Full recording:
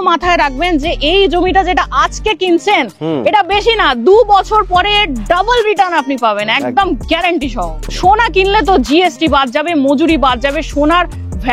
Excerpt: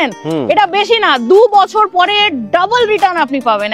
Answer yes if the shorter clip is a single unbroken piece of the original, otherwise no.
yes